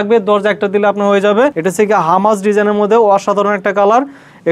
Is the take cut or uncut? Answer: cut